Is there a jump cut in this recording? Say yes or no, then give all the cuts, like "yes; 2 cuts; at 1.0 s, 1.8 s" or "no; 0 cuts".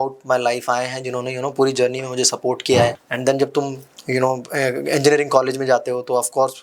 yes; 1 cut; at 3.0 s